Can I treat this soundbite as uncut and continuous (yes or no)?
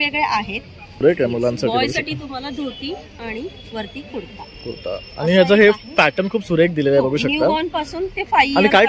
no